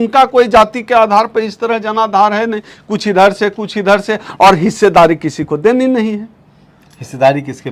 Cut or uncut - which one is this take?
uncut